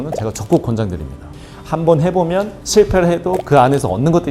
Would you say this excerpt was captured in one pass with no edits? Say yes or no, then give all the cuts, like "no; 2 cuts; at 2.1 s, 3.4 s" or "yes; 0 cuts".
yes; 0 cuts